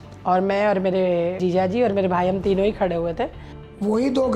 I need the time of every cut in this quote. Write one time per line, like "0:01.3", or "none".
0:01.4
0:03.4